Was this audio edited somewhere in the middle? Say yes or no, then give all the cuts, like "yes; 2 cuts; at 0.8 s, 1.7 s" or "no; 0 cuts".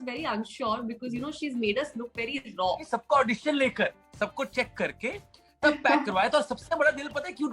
yes; 1 cut; at 2.8 s